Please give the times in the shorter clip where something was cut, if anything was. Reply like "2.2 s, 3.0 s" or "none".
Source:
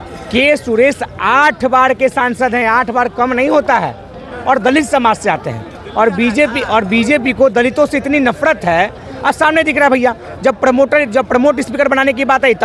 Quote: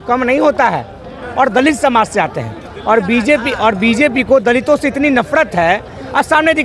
none